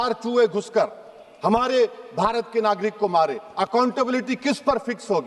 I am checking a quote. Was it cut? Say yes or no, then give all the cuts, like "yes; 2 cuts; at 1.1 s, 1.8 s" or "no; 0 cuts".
no; 0 cuts